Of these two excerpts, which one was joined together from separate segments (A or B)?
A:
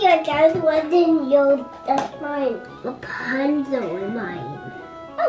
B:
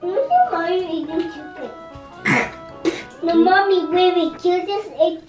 B